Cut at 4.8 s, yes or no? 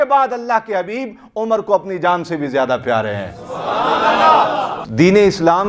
yes